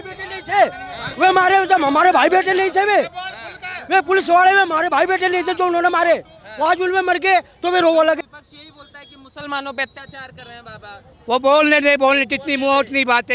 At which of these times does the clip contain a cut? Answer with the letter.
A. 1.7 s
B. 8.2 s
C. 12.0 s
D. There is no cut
B